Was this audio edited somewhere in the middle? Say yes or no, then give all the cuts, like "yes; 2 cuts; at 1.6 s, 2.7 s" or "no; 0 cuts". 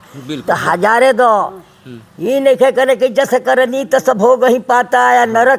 no; 0 cuts